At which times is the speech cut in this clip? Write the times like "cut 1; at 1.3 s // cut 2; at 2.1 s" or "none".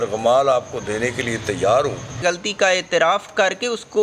cut 1; at 2.1 s // cut 2; at 3.3 s